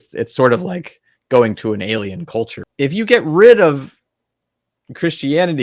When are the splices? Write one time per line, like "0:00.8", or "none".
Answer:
0:02.6

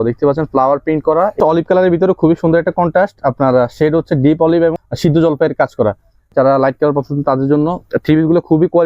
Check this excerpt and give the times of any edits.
0:01.4
0:04.9
0:06.3

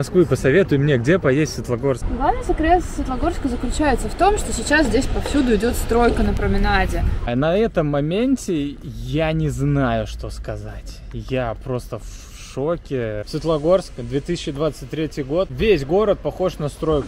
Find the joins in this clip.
0:02.1
0:07.1
0:13.3
0:15.5

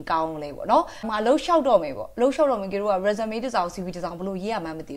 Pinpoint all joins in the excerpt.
0:01.1

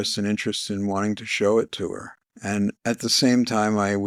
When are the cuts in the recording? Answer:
none

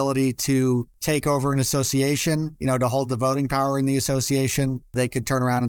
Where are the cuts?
0:00.9
0:04.9

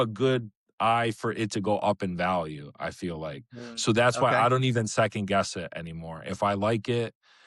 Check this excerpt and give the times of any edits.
none

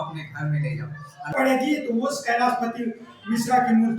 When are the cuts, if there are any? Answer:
0:01.3

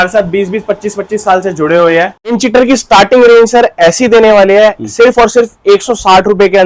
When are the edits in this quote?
0:02.4

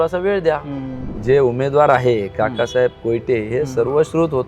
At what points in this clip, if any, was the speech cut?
0:01.1

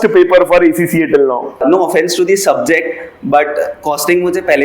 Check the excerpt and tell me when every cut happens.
0:01.6

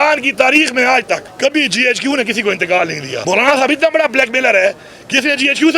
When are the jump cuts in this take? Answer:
0:01.3
0:03.1

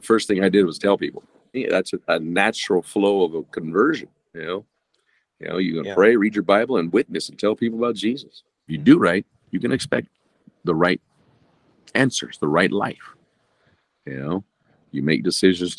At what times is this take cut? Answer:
0:01.6
0:08.7

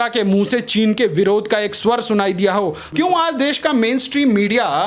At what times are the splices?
0:02.8

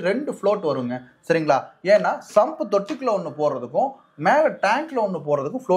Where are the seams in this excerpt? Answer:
none

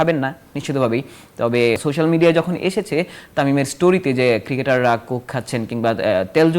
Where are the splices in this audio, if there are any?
0:01.8

